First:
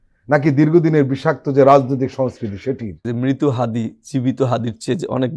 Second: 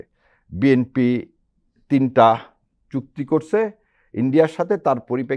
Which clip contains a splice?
first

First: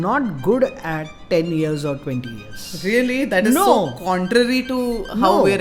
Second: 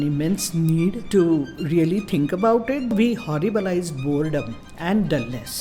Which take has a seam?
second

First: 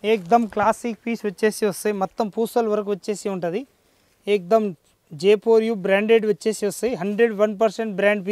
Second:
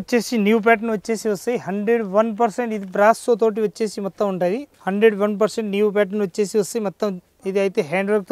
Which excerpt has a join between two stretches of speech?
second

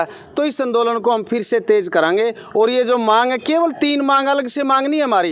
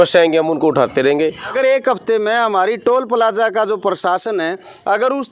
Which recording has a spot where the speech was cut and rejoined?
second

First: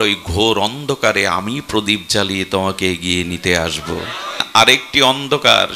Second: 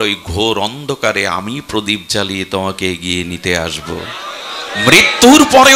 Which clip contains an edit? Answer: first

